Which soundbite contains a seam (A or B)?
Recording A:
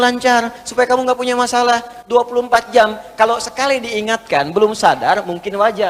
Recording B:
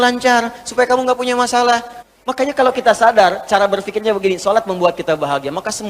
B